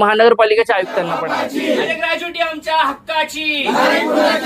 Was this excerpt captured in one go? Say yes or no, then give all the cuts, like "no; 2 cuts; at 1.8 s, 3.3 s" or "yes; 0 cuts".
no; 1 cut; at 1.0 s